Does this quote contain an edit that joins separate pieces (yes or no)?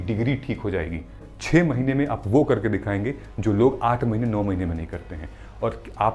yes